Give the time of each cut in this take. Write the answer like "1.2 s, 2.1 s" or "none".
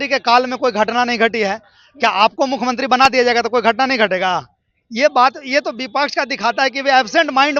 none